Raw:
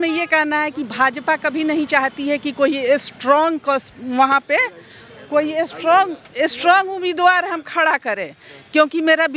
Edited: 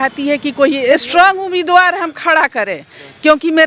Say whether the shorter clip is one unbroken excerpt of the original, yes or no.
no